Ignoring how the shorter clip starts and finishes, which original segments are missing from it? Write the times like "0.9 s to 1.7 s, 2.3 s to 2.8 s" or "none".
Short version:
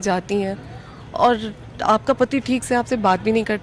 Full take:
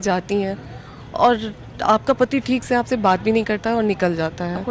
none

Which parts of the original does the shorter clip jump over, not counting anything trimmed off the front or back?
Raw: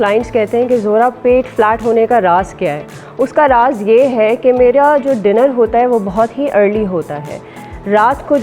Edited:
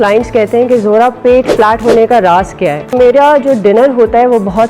3.0 s to 4.6 s

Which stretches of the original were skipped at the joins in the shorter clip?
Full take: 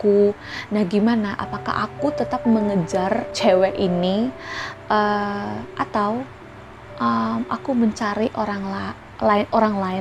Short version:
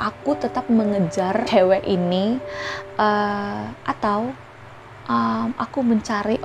3.2 s to 3.4 s

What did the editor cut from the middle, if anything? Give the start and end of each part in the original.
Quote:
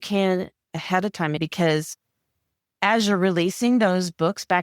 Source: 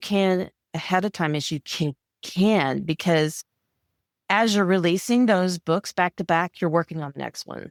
1.4 s to 2.9 s

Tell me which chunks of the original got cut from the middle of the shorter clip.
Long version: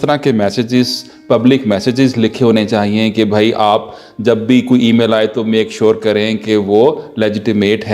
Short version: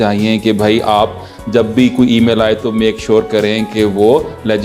none

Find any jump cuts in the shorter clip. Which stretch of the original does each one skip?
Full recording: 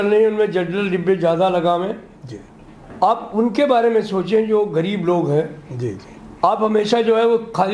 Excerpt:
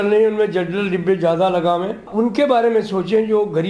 2.1 s to 3.3 s

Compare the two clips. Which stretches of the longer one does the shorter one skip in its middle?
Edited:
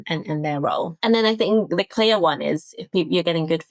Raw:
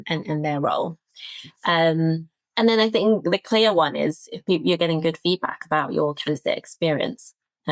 0.9 s to 2.5 s

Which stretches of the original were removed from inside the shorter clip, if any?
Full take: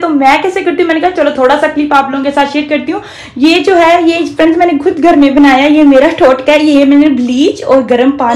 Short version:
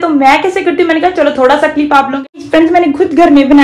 2.3 s to 4.2 s

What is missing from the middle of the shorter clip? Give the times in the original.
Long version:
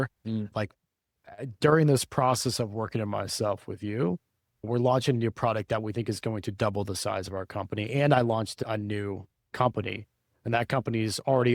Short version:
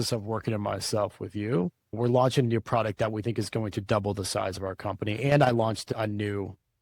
4.3 s to 4.5 s

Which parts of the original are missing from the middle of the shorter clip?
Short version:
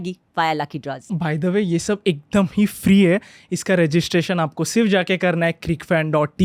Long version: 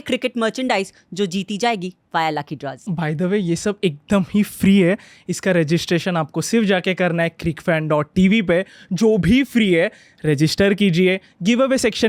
none

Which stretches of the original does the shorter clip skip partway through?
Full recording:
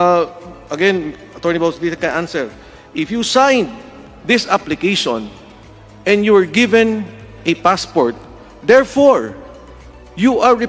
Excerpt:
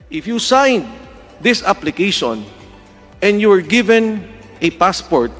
none

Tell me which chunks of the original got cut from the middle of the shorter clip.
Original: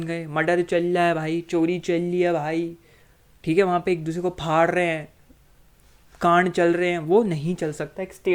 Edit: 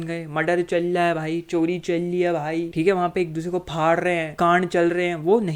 2.7 s to 3.4 s, 5.0 s to 6.1 s

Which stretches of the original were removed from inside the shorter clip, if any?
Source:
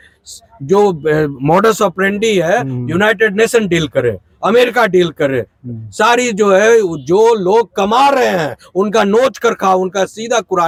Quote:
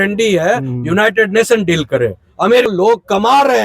4.7 s to 7.4 s

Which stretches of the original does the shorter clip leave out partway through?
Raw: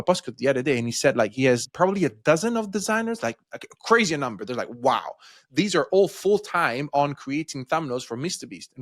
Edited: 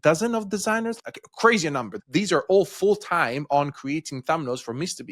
3.2 s to 3.4 s, 4.4 s to 5.4 s

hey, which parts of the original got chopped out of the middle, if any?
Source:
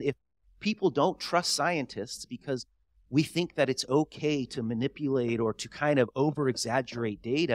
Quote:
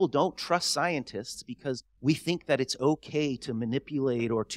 2.7 s to 3.0 s

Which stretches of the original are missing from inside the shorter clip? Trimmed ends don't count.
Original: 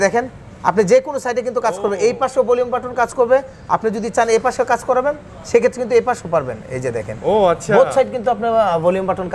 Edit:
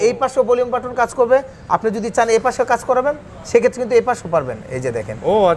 none

